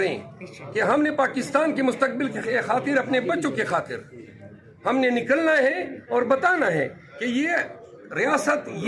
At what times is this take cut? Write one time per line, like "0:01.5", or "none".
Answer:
none